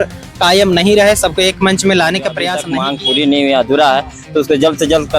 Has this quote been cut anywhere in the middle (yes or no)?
yes